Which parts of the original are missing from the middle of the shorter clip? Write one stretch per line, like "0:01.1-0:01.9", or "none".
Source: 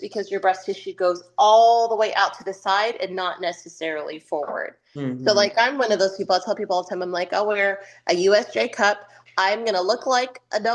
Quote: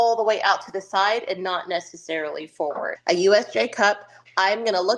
0:04.6-0:07.9